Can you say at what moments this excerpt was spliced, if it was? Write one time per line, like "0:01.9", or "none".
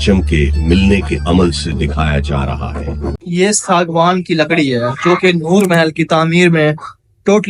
0:03.2